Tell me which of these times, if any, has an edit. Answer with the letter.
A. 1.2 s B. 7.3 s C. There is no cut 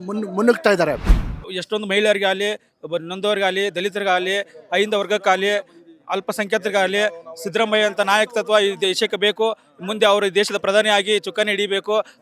A